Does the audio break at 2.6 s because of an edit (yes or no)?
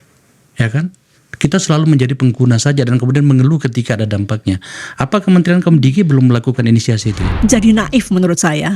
no